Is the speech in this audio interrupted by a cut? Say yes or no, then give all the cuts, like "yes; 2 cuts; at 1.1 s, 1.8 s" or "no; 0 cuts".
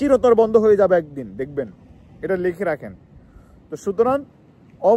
no; 0 cuts